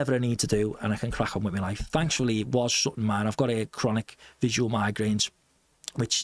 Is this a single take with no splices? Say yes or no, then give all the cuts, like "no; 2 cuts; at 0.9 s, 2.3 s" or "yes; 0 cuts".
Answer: yes; 0 cuts